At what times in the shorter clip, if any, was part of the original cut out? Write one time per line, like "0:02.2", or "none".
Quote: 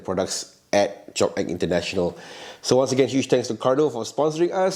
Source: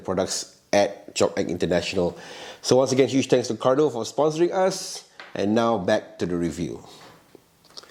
none